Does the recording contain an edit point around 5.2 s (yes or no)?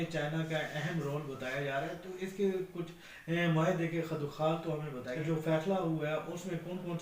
yes